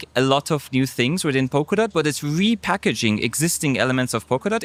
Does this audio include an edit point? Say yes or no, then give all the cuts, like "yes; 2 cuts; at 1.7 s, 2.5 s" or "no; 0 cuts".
no; 0 cuts